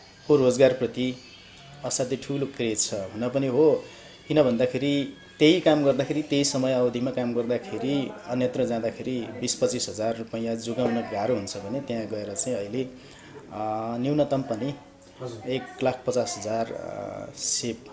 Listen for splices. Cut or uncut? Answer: uncut